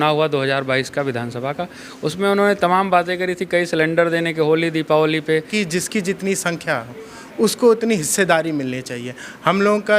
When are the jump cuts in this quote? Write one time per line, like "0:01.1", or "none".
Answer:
0:05.5